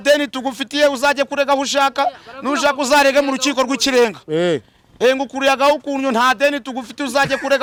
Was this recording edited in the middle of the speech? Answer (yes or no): no